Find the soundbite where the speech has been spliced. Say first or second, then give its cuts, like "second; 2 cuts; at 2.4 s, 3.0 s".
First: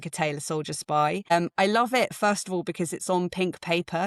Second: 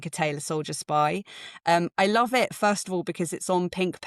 first; 1 cut; at 1.3 s